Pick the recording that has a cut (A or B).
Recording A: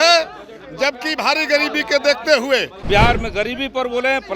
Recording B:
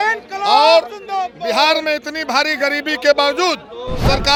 A